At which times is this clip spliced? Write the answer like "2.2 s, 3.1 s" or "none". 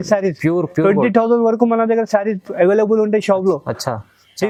none